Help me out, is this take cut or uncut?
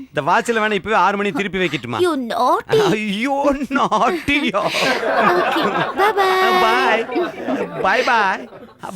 uncut